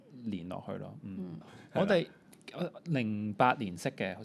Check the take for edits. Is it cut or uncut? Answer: cut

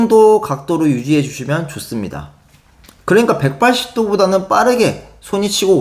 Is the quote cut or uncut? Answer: uncut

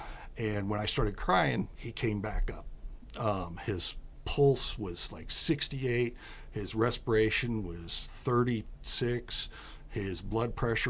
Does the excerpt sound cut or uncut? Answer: cut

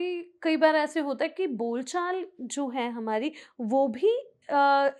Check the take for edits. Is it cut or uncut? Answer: uncut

